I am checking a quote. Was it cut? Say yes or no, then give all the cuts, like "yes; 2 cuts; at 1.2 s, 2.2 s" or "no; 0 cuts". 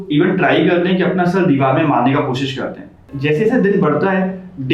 yes; 1 cut; at 3.0 s